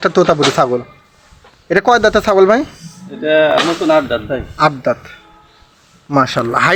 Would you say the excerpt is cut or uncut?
uncut